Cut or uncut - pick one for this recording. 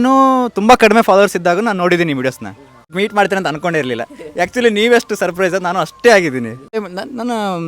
cut